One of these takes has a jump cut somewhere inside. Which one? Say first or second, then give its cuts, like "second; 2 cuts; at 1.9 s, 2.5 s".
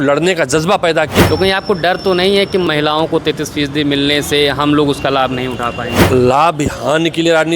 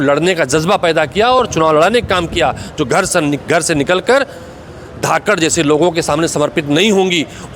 first; 3 cuts; at 1.2 s, 2.7 s, 6.1 s